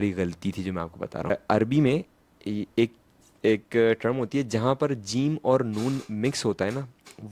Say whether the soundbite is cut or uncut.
cut